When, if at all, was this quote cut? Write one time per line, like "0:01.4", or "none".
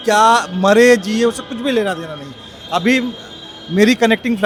none